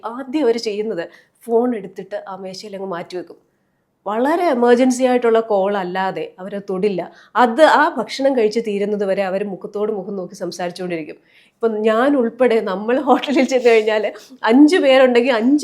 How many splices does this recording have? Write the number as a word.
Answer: zero